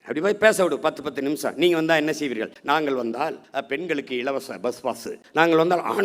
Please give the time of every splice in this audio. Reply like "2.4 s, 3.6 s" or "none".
2.5 s, 3.4 s, 5.2 s